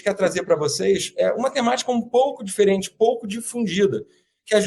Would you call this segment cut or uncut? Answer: uncut